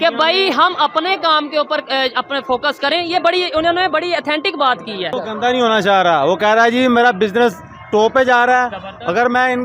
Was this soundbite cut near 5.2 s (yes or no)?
yes